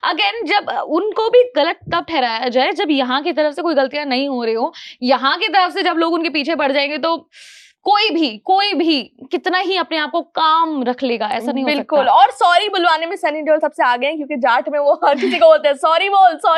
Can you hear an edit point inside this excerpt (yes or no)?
no